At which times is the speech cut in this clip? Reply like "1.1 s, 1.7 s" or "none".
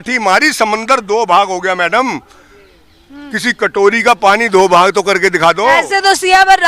none